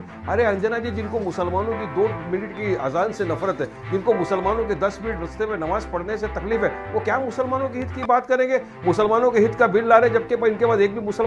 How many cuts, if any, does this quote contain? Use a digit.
0